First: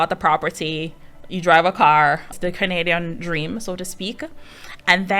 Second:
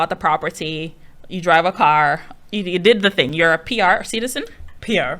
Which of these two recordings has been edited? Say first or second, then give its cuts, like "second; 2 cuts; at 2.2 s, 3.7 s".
first; 1 cut; at 2.4 s